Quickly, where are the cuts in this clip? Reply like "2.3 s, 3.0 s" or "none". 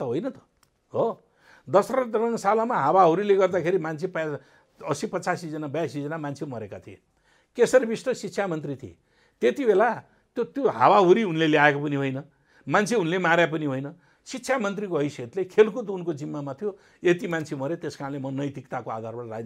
none